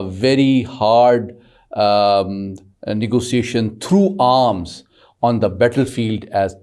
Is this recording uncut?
yes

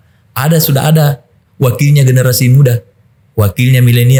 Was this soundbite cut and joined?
no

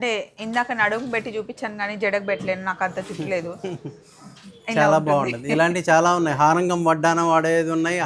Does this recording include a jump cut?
no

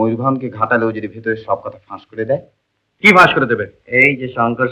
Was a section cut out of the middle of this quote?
no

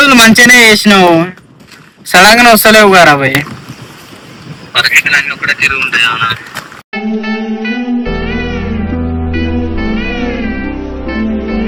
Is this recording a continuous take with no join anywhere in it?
yes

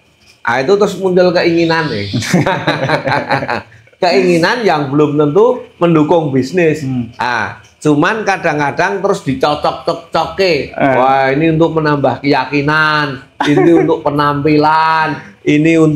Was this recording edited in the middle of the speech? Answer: no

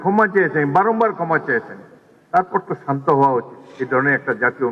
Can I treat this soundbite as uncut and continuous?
yes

